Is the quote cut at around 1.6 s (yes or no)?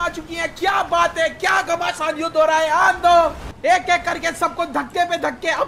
no